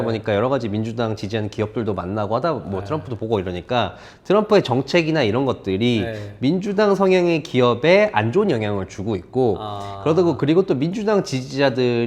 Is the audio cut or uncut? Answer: uncut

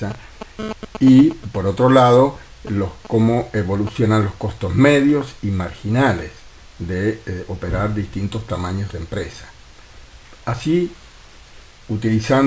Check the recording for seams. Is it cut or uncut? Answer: cut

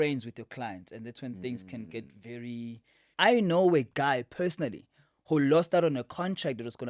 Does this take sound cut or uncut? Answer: cut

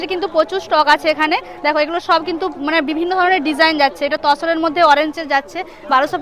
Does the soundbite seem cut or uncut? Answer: uncut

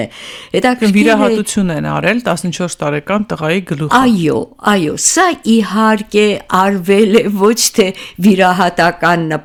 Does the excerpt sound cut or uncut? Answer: uncut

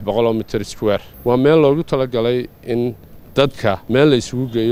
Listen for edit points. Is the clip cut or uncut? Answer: cut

